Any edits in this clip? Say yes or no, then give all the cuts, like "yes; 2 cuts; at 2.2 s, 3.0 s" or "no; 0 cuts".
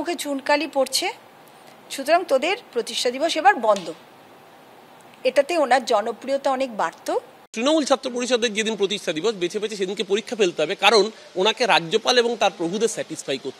yes; 1 cut; at 7.4 s